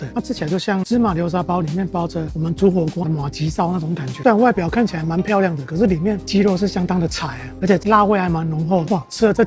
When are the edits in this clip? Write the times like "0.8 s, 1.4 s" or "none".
4.2 s, 7.5 s